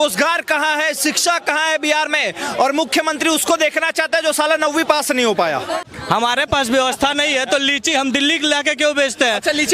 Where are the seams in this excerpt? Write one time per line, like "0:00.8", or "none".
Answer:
0:05.8